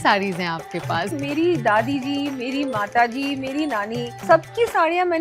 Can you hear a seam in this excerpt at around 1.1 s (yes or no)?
yes